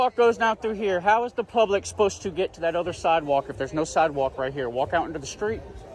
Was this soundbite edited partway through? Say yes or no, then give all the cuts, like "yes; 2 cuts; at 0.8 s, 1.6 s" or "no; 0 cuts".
no; 0 cuts